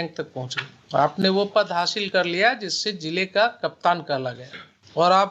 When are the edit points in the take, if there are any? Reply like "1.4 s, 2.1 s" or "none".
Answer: none